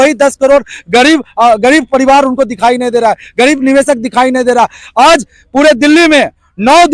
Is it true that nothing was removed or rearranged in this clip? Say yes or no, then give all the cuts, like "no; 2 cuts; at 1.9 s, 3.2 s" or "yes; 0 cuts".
yes; 0 cuts